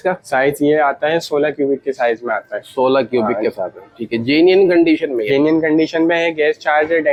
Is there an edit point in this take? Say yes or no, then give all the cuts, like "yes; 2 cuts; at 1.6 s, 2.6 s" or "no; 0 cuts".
no; 0 cuts